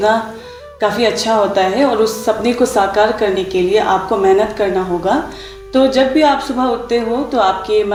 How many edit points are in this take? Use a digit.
0